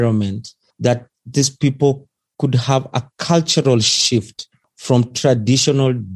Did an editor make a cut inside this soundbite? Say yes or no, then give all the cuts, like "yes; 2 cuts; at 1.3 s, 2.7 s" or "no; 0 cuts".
no; 0 cuts